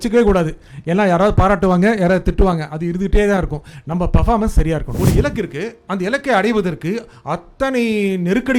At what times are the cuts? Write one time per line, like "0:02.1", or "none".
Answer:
0:04.9

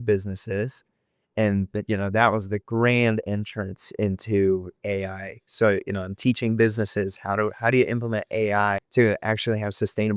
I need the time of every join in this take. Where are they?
0:04.8
0:08.8

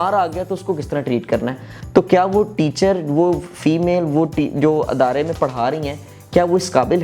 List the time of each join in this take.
0:01.7

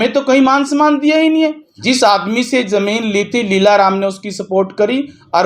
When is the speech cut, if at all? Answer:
0:01.7

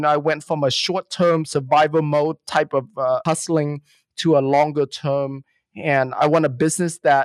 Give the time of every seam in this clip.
0:03.2
0:06.1

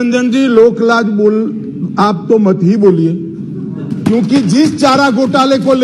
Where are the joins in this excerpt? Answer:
none

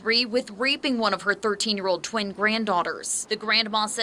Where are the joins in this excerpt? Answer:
0:03.1

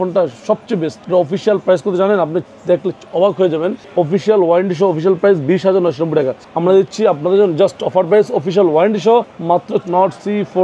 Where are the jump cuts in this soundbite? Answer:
0:01.0
0:03.8
0:06.4
0:09.8

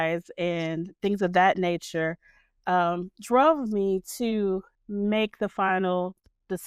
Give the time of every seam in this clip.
0:04.8

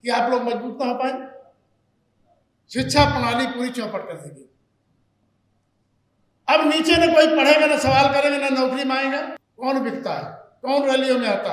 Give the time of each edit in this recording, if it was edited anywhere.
0:09.4

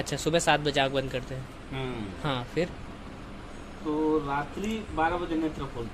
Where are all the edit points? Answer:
none

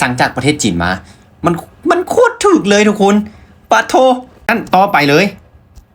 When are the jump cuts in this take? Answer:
0:04.5

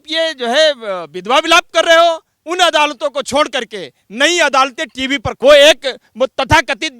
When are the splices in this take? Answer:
0:02.3
0:05.4

